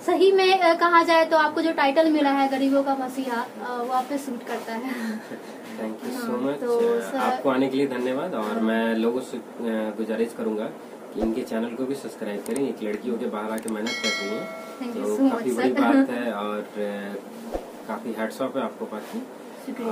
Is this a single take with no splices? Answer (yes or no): yes